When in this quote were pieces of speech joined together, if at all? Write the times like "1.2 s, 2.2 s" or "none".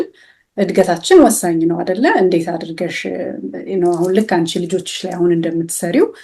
none